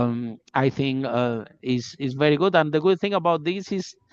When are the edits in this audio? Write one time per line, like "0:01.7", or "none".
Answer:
none